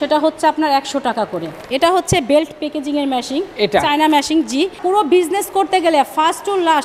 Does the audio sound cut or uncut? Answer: cut